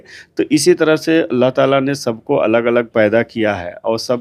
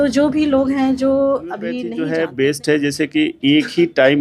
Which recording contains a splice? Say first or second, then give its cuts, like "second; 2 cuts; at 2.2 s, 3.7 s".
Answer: second; 1 cut; at 1.9 s